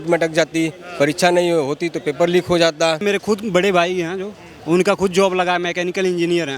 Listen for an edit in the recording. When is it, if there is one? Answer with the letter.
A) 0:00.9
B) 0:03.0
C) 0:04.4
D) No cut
B